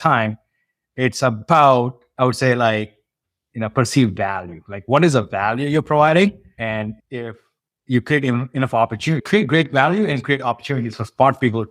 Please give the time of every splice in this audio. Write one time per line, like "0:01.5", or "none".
0:06.6